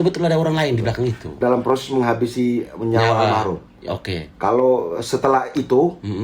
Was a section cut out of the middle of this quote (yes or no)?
yes